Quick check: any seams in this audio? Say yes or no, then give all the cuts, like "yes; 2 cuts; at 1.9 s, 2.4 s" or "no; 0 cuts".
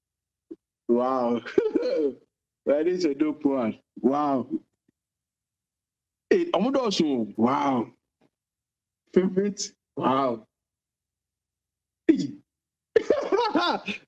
yes; 1 cut; at 7.3 s